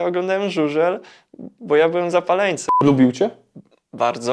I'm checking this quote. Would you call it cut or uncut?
cut